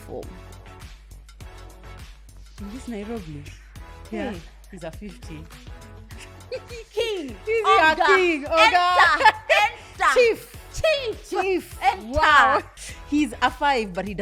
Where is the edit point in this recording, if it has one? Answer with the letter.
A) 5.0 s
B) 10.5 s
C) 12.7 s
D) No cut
C